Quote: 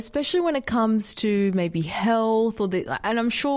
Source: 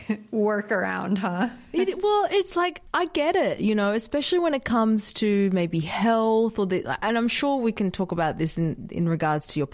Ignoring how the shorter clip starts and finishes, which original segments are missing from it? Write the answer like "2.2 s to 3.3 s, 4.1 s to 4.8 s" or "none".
none